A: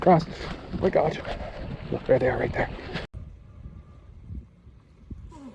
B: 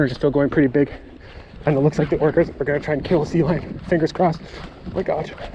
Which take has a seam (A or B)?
A